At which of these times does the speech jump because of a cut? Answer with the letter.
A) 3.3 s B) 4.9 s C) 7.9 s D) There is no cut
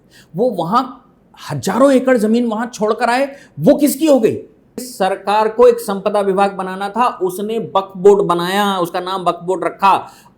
B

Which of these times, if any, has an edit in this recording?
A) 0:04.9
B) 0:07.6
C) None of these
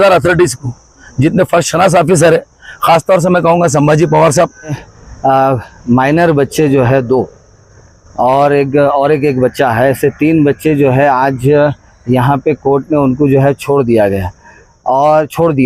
A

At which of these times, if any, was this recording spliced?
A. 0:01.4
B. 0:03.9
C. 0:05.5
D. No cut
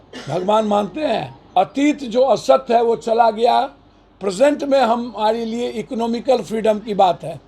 A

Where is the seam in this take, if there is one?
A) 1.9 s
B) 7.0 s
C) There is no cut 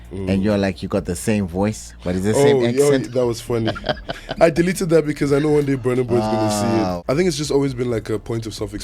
B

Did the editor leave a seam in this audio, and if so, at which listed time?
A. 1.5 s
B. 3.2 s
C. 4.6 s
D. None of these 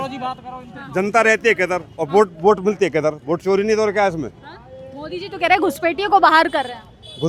D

